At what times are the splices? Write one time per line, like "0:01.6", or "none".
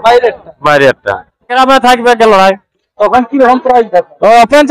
0:01.5